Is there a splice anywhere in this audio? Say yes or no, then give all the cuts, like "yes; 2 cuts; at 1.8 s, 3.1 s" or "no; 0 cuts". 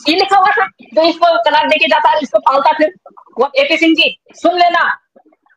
yes; 1 cut; at 3.5 s